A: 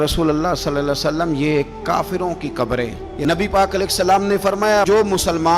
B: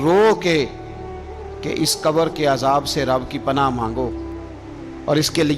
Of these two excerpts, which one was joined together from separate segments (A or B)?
A